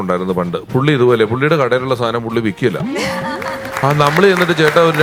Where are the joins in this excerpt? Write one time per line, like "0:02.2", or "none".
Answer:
none